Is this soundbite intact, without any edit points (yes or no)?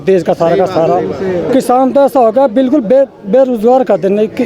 yes